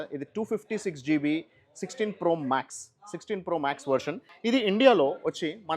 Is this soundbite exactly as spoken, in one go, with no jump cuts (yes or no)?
no